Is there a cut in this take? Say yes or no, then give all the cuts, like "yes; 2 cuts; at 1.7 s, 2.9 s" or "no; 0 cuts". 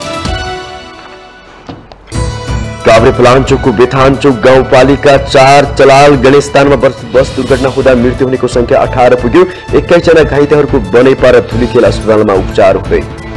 yes; 1 cut; at 1.8 s